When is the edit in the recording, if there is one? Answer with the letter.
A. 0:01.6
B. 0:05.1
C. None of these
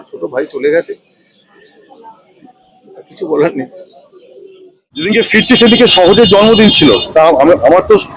B